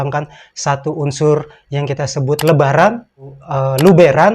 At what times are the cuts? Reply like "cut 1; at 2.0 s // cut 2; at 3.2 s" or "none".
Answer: cut 1; at 3.3 s